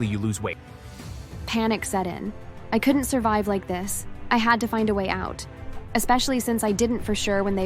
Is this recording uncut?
yes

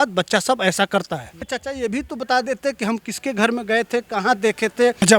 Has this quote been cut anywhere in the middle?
yes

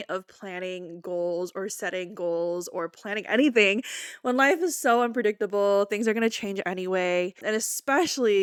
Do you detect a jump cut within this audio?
no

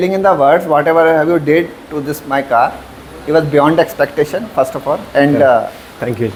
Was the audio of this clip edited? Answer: no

